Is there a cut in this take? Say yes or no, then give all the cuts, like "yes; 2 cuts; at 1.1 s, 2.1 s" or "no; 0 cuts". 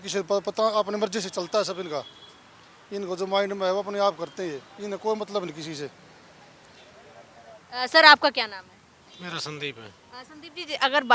no; 0 cuts